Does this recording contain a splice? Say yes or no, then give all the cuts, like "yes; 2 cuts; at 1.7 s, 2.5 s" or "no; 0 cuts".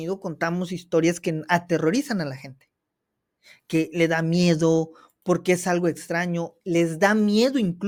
no; 0 cuts